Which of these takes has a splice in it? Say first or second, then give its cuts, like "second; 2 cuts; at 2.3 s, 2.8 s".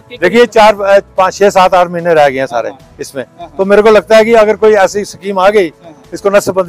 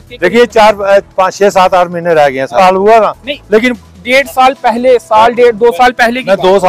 second; 1 cut; at 2.6 s